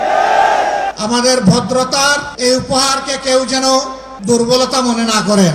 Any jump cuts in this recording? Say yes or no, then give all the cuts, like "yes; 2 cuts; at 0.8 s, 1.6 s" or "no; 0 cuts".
yes; 3 cuts; at 0.9 s, 2.3 s, 4.0 s